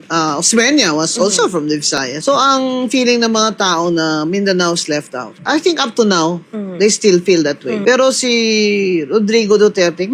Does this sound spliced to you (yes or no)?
yes